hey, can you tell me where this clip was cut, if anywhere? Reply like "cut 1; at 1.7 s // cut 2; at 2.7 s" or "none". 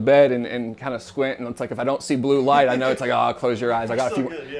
none